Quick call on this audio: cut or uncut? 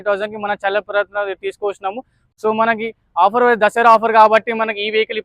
cut